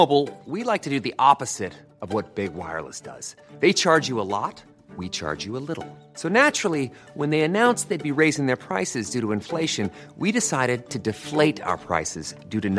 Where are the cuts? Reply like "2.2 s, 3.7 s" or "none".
none